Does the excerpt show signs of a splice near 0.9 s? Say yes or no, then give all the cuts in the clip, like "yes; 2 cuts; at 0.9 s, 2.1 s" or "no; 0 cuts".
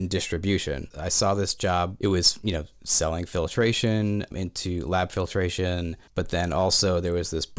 yes; 4 cuts; at 0.9 s, 1.9 s, 4.3 s, 6.0 s